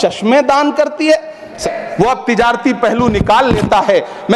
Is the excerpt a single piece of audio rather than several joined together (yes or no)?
no